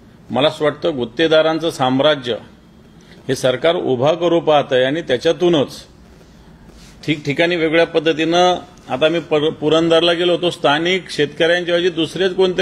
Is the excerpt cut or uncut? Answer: uncut